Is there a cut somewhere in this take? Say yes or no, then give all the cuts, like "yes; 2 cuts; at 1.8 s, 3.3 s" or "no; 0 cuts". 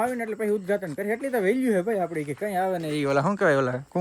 no; 0 cuts